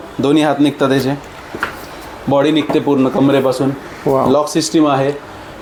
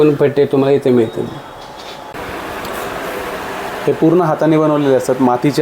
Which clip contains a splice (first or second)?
second